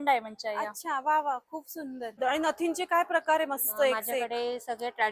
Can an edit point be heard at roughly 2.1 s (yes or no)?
yes